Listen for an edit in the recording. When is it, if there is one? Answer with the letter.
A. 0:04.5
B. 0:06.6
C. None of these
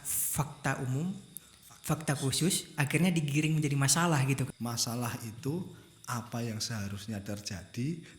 A